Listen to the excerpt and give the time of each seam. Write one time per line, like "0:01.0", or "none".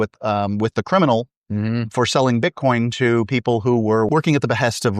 0:04.1

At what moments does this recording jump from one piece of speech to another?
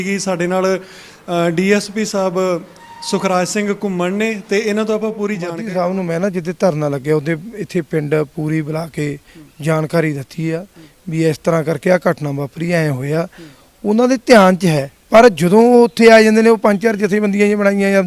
0:05.5

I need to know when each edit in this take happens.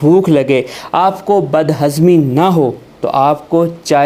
none

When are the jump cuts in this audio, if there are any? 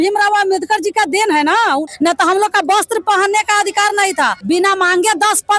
0:01.8
0:04.4

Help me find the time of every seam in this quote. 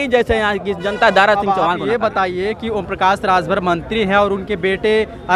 none

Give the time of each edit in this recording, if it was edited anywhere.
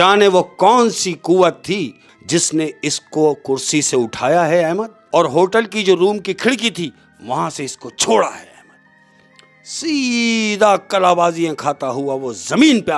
0:02.1
0:04.9

